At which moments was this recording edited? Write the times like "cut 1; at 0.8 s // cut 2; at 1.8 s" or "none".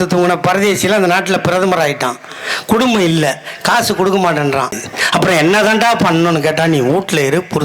cut 1; at 4.8 s